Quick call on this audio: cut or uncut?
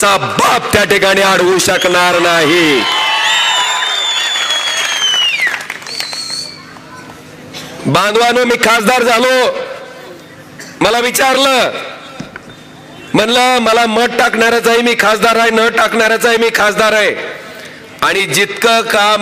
uncut